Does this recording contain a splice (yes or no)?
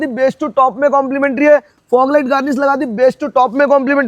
no